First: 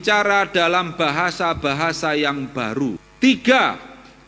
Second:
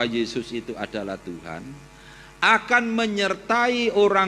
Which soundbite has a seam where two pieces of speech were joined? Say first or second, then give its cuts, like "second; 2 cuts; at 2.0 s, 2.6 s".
first; 1 cut; at 3.1 s